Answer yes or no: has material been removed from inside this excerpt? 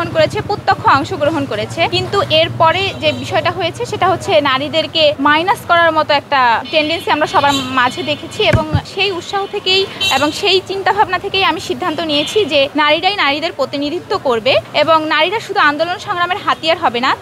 yes